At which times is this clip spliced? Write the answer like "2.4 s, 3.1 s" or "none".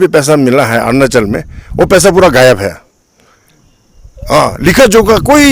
none